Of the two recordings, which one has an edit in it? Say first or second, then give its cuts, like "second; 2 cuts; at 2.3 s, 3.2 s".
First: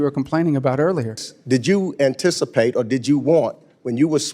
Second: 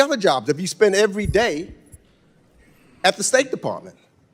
first; 1 cut; at 1.3 s